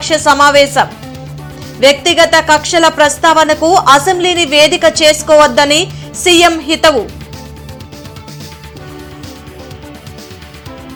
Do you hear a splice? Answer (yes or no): no